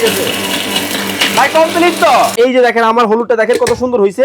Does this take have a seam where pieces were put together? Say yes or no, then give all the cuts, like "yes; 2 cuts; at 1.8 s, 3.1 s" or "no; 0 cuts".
yes; 1 cut; at 2.3 s